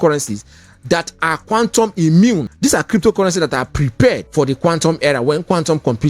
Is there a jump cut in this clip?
yes; 2 cuts; at 2.5 s, 4.2 s

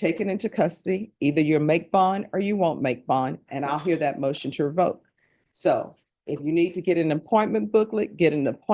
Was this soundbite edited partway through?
no; 0 cuts

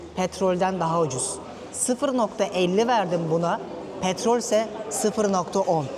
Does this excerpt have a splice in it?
no; 0 cuts

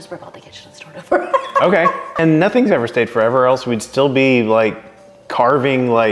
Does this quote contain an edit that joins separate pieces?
yes; 1 cut; at 2.2 s

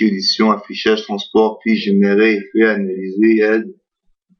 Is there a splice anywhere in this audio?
yes; 1 cut; at 1.8 s

